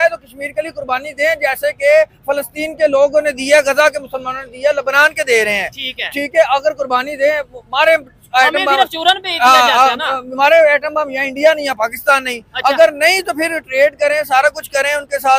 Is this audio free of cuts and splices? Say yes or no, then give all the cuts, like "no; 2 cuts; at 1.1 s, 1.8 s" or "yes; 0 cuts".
yes; 0 cuts